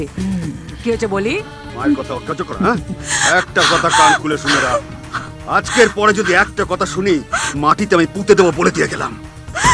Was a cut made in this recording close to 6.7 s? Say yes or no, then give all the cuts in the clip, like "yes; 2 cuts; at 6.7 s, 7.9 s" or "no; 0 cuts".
no; 1 cut; at 1.6 s